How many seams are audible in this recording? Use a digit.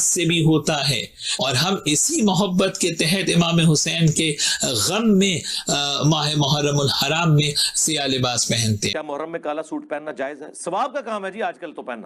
1